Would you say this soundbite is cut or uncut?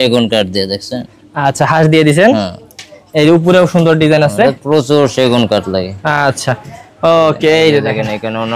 uncut